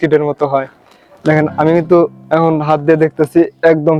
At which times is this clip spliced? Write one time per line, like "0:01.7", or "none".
none